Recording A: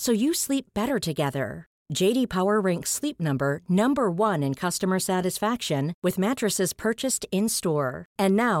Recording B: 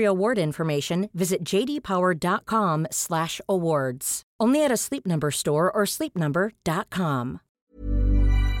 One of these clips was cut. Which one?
B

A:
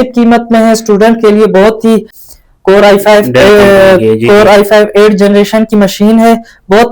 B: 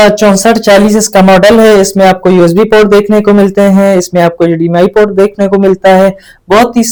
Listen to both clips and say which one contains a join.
A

